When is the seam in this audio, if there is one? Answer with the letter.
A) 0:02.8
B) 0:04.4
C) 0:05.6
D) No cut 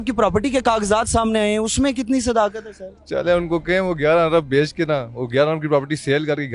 D